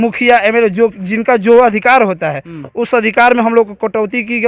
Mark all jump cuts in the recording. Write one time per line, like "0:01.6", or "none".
none